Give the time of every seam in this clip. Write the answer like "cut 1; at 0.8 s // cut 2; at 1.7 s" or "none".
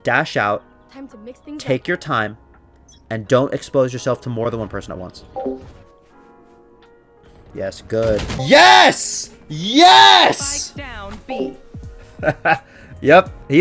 cut 1; at 4.4 s // cut 2; at 8.4 s